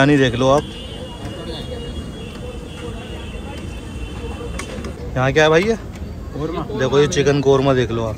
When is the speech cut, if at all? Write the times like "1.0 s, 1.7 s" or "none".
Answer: none